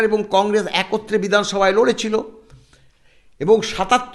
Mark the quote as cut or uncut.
uncut